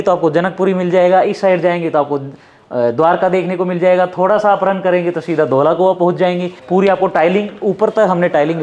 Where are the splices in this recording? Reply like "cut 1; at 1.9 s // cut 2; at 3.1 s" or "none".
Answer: cut 1; at 6.5 s